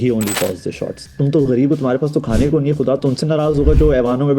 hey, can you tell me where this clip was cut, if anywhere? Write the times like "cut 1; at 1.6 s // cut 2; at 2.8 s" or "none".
cut 1; at 1.1 s